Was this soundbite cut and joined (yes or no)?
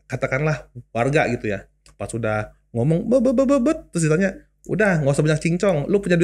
no